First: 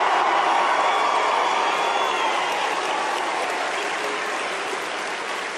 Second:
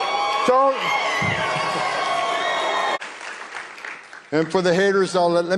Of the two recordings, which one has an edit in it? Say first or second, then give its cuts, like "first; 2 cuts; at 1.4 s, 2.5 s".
second; 1 cut; at 3.0 s